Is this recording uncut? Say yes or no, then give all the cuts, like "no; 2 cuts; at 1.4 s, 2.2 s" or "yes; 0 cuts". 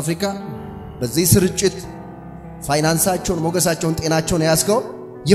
yes; 0 cuts